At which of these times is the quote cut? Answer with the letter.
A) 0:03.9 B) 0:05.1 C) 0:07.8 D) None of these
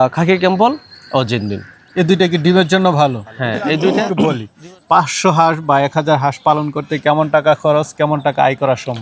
A